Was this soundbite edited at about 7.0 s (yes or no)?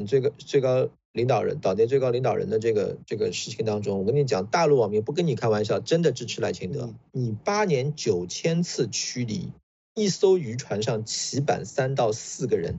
yes